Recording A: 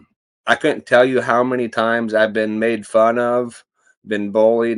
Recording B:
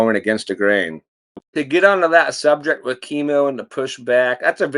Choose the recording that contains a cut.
B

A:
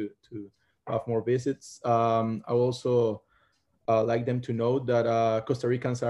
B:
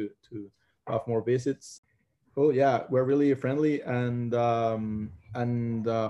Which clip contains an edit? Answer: B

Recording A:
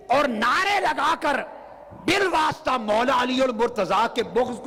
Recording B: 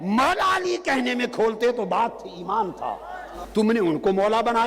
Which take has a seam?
B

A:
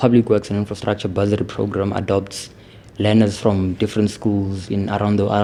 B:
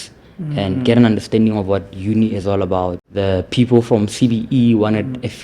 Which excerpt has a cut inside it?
B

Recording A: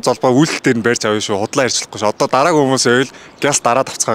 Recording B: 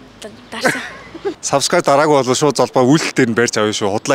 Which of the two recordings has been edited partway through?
B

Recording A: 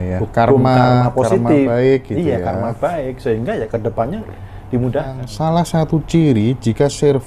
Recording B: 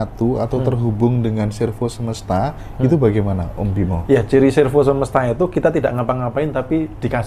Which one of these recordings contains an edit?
A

